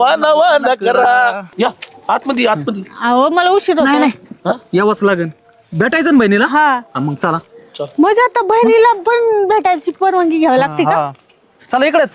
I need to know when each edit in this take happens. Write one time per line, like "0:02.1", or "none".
0:01.4